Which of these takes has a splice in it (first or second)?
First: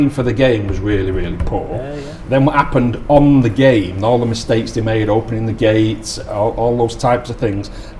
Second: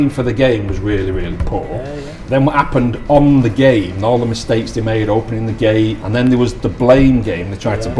second